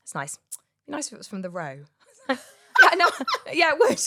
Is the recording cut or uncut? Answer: uncut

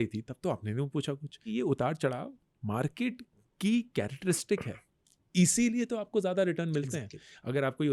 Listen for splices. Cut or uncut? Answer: cut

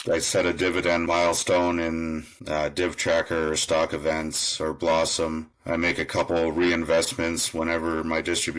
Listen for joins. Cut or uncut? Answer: cut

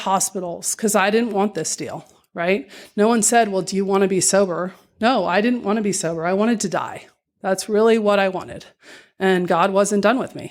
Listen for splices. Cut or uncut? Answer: uncut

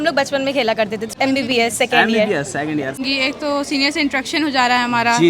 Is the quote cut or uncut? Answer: cut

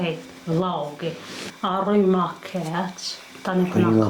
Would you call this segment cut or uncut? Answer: cut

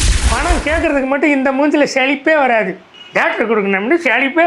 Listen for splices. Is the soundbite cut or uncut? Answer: cut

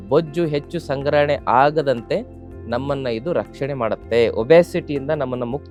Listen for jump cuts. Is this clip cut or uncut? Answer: uncut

